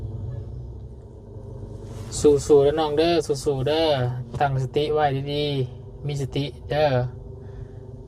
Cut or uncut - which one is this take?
cut